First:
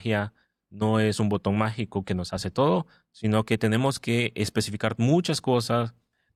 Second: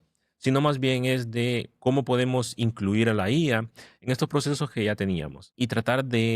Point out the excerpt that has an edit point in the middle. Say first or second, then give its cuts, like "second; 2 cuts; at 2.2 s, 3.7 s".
second; 1 cut; at 5.4 s